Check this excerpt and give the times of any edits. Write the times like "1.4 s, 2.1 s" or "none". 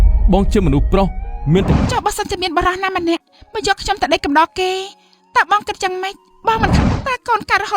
1.8 s, 3.2 s, 6.7 s